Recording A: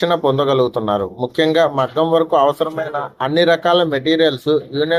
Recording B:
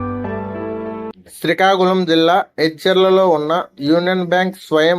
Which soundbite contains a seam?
B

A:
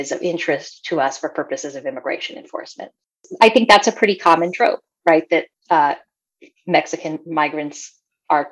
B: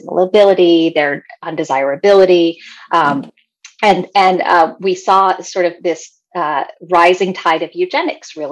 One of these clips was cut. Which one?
A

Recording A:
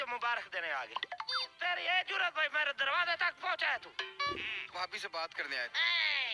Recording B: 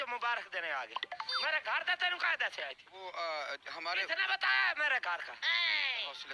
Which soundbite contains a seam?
A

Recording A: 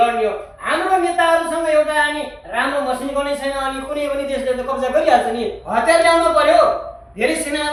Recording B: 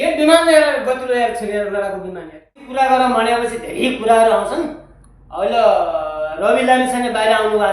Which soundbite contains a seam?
B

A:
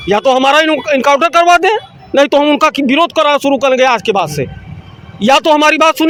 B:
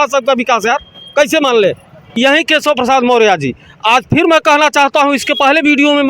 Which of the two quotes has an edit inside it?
B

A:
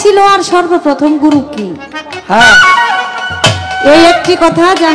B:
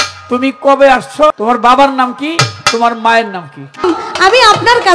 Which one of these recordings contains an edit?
B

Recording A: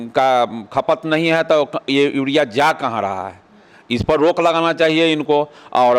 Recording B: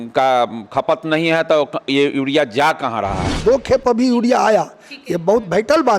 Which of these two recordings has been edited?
B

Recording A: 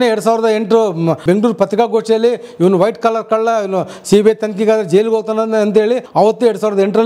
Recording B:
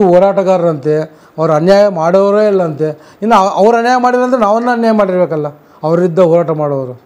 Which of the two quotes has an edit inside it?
A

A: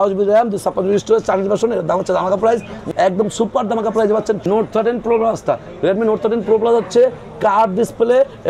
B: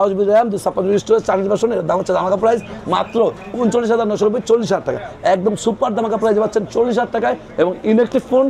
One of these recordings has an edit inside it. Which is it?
A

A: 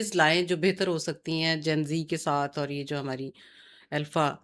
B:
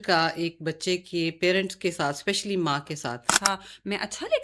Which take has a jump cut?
B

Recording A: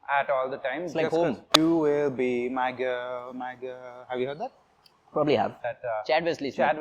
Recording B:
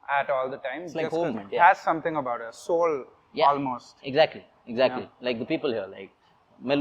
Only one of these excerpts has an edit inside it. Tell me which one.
A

